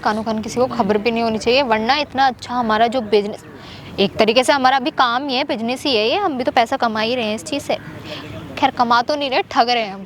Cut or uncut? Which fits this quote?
uncut